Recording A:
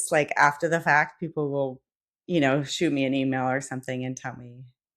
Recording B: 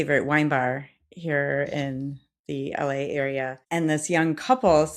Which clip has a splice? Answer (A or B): B